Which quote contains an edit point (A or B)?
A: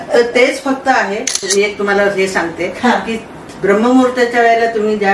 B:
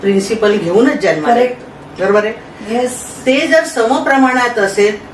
A